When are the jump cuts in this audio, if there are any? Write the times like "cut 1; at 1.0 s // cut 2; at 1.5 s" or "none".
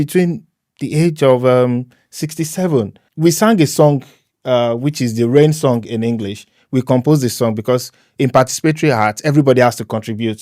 cut 1; at 3.0 s